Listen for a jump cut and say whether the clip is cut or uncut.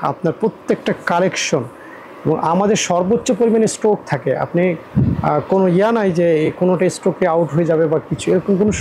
uncut